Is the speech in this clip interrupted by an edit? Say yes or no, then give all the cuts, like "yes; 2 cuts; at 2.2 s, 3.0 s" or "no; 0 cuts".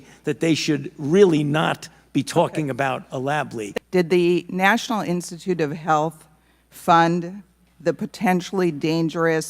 yes; 1 cut; at 3.6 s